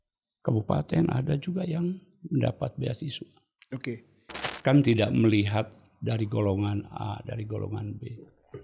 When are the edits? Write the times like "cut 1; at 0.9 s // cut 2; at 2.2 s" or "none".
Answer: cut 1; at 4.4 s